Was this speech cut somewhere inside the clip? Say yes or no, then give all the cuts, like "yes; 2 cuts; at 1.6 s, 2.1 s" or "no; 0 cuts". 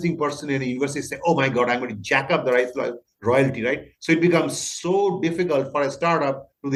no; 0 cuts